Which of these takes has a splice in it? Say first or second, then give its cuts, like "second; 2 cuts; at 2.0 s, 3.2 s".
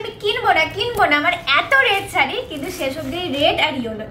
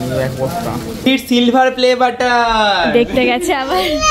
second; 1 cut; at 1.1 s